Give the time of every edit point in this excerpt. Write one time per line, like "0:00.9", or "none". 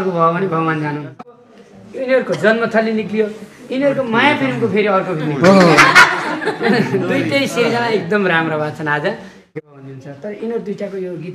0:01.4
0:09.6